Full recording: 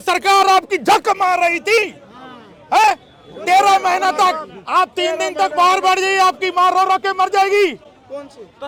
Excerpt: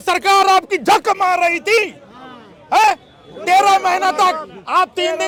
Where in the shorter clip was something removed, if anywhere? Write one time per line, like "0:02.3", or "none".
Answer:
none